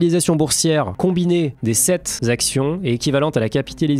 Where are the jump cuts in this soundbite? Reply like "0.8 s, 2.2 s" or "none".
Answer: 0.9 s, 2.1 s